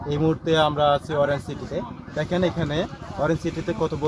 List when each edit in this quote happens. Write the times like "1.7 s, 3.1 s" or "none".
none